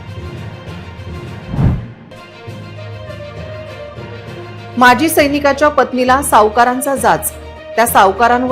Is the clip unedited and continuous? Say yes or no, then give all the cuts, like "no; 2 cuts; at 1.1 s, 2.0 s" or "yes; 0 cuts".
no; 3 cuts; at 1.4 s, 2.0 s, 4.3 s